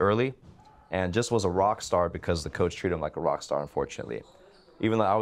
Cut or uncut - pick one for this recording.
uncut